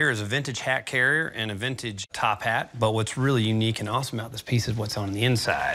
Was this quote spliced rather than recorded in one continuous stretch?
no; 0 cuts

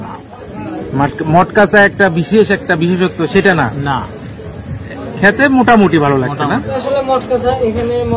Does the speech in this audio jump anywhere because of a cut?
yes; 1 cut; at 6.8 s

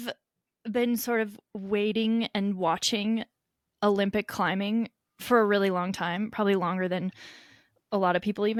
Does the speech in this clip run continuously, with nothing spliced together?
yes; 0 cuts

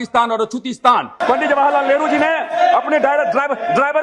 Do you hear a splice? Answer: yes; 1 cut; at 1.2 s

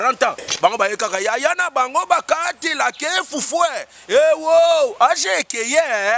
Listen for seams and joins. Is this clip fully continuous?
yes; 0 cuts

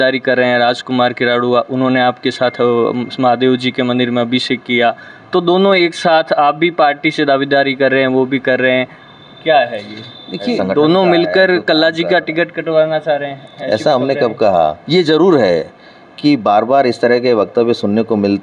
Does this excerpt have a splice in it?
yes; 2 cuts; at 10.5 s, 14.8 s

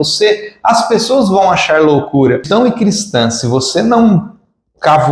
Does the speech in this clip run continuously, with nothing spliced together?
no; 1 cut; at 2.4 s

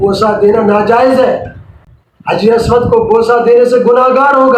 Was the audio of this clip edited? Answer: no; 0 cuts

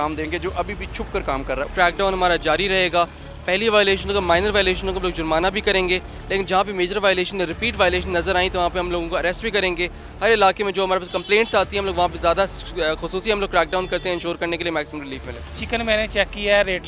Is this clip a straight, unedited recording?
no; 3 cuts; at 1.7 s, 10.0 s, 15.4 s

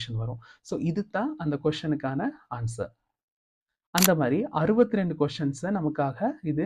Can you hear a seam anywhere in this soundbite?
no; 0 cuts

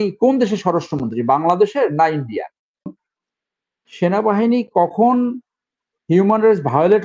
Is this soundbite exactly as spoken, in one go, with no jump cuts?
no; 1 cut; at 3.0 s

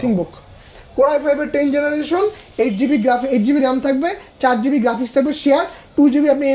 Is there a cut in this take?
no; 0 cuts

